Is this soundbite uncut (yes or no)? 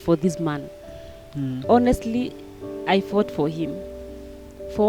yes